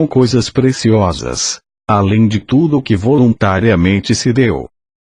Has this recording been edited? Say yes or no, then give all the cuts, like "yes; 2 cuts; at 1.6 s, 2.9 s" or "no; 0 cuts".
yes; 1 cut; at 2.7 s